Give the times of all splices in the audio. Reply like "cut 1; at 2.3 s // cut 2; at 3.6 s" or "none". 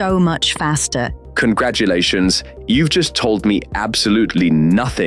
cut 1; at 1.2 s